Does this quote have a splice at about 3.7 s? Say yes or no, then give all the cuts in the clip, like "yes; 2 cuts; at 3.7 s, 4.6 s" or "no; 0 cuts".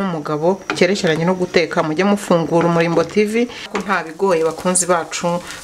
yes; 1 cut; at 3.7 s